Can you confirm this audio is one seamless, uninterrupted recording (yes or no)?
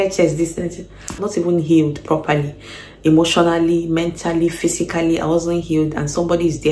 no